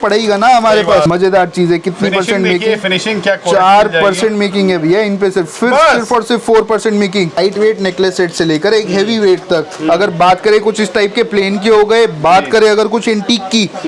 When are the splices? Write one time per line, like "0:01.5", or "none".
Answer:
0:01.1
0:07.4